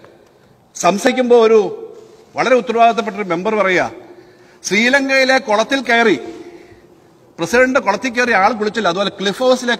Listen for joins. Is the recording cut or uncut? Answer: cut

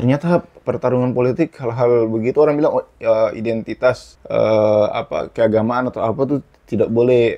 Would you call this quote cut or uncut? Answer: cut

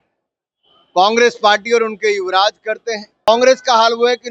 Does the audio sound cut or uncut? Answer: cut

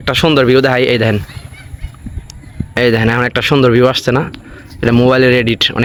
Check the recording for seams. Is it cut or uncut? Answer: uncut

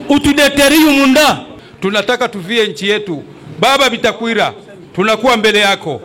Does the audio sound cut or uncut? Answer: cut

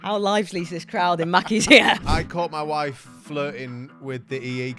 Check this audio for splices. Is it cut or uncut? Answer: cut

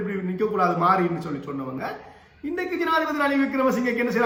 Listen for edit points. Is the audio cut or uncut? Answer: uncut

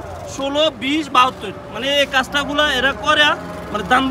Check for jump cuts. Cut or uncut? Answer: uncut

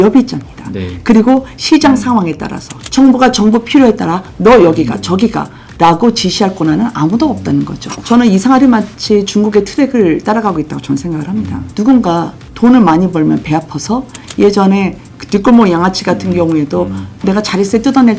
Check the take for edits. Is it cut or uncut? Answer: cut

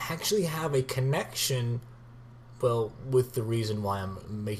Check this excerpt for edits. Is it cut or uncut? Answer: cut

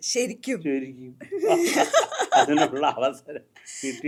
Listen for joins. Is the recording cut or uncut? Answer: uncut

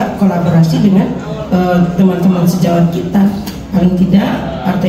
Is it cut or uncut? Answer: uncut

